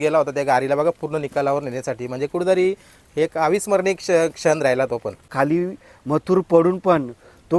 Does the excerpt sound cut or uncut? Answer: cut